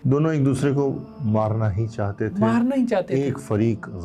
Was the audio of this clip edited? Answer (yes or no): no